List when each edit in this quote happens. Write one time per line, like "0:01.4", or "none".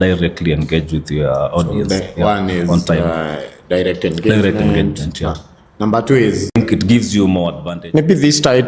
0:06.5
0:07.7